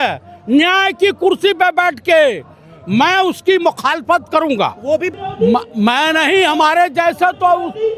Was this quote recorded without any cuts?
no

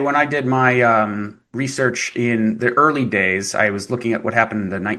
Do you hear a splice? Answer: no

